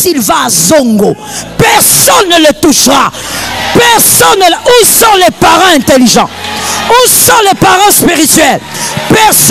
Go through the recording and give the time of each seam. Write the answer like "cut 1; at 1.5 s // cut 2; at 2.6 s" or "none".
none